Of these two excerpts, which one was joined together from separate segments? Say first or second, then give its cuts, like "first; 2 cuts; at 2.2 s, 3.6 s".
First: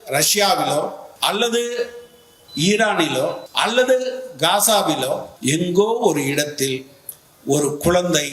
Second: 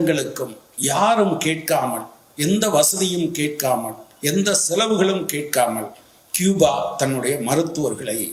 first; 3 cuts; at 1.1 s, 3.4 s, 5.3 s